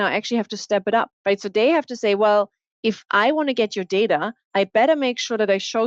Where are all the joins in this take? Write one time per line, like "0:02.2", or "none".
0:01.1
0:04.4